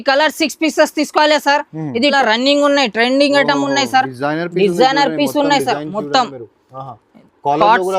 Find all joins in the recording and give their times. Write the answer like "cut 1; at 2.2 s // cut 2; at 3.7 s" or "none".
cut 1; at 2.1 s